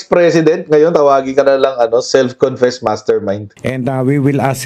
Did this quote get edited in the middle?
yes; 1 cut; at 3.5 s

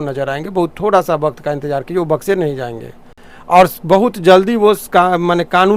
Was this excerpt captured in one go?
yes; 0 cuts

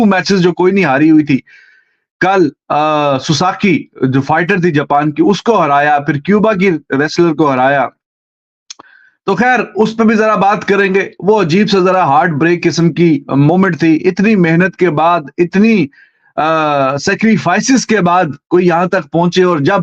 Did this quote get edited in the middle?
no; 0 cuts

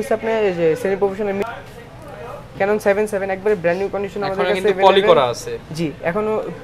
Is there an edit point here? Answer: yes; 1 cut; at 1.4 s

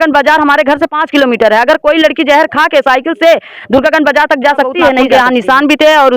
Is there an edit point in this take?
yes; 1 cut; at 5.0 s

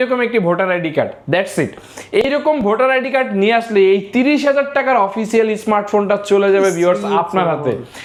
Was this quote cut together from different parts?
no; 0 cuts

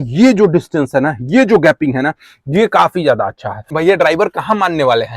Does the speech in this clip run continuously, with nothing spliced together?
no; 1 cut; at 3.7 s

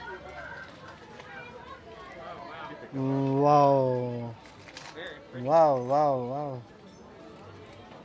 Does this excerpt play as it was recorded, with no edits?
yes; 0 cuts

